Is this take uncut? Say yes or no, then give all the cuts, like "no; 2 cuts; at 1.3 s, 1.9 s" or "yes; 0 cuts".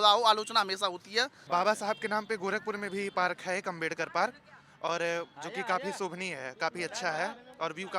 no; 1 cut; at 1.4 s